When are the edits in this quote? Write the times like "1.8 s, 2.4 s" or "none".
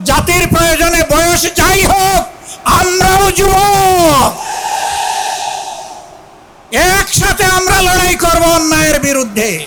none